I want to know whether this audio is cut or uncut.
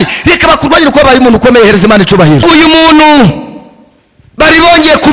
cut